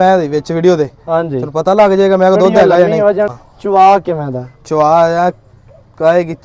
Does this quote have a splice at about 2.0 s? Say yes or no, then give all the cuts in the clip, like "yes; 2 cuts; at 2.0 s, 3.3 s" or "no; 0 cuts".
no; 1 cut; at 3.3 s